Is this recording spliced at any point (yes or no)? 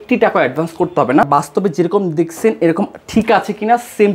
yes